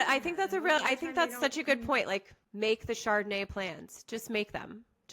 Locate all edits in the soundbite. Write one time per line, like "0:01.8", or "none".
0:02.4